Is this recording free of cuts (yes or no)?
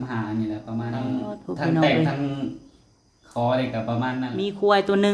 no